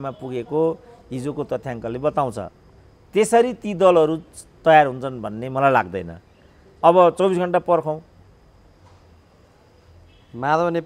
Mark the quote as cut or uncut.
uncut